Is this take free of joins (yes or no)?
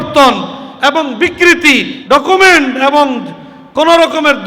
no